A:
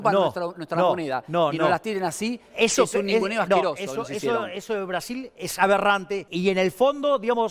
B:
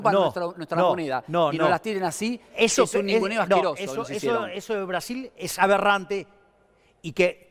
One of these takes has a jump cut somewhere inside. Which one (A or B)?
A